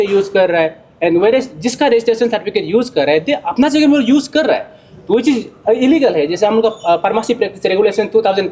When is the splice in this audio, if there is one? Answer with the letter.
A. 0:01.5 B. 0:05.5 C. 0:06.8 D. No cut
D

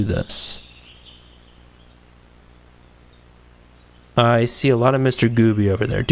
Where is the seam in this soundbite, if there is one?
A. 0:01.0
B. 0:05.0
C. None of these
C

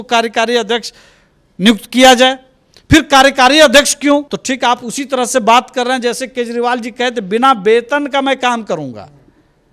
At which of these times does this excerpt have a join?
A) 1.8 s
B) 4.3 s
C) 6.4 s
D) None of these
B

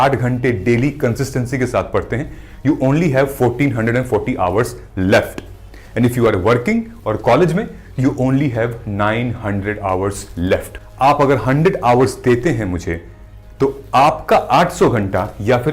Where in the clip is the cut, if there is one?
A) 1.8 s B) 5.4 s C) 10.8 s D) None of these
C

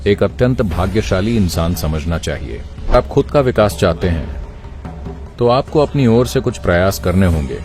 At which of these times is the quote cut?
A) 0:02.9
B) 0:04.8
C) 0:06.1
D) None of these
A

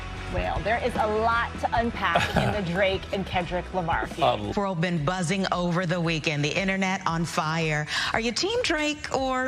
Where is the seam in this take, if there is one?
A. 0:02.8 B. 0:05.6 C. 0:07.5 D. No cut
D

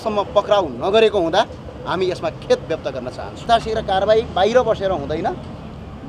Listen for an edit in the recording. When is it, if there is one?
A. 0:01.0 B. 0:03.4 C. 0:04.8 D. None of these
B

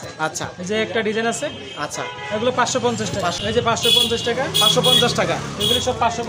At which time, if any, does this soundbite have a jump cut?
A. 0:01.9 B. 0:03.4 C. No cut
B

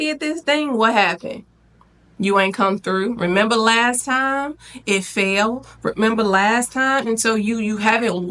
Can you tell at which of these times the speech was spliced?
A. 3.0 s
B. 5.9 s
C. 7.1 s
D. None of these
C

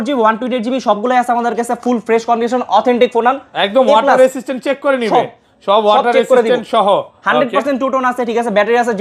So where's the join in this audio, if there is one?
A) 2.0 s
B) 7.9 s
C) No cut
C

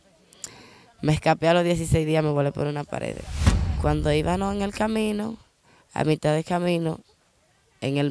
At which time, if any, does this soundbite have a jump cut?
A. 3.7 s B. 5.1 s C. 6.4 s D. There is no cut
A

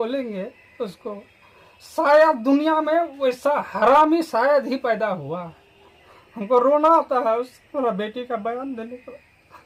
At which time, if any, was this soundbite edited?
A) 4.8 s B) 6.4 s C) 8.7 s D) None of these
D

